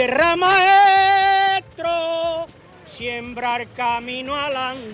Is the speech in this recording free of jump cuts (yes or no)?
yes